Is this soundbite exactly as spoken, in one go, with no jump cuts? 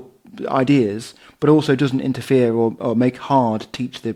yes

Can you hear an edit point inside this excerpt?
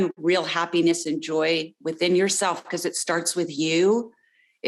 no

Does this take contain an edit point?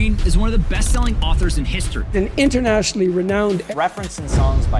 yes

